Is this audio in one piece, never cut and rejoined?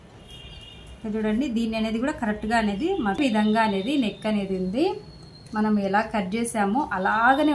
no; 1 cut; at 3.2 s

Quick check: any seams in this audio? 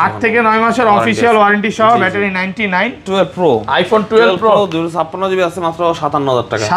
yes; 1 cut; at 3.0 s

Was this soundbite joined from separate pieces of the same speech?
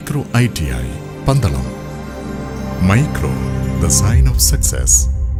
no; 0 cuts

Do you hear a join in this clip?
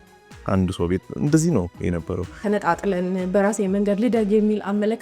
yes; 1 cut; at 2.4 s

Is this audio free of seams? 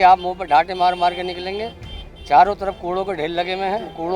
yes; 0 cuts

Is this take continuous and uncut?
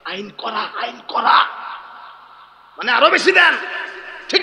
yes; 0 cuts

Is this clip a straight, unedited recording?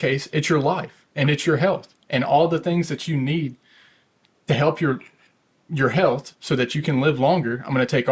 yes; 0 cuts

